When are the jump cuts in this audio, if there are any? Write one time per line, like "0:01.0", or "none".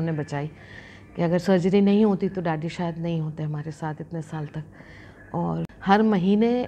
0:05.7